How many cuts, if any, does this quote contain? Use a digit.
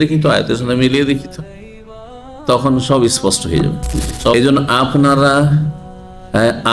1